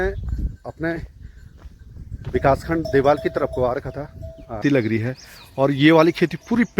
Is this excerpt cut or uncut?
cut